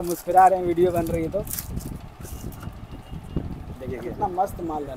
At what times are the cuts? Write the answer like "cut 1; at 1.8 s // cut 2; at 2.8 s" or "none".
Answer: none